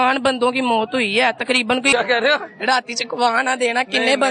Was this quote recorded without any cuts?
no; 1 cut; at 1.9 s

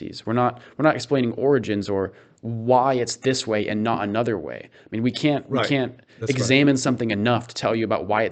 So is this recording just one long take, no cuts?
yes; 0 cuts

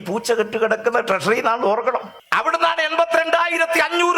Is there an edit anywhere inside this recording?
yes; 1 cut; at 2.2 s

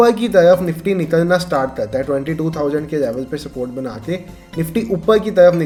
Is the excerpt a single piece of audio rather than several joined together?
yes; 0 cuts

